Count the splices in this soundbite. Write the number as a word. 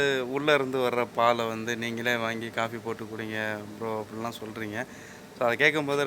zero